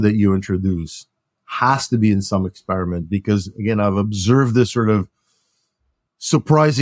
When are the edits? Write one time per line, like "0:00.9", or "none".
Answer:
none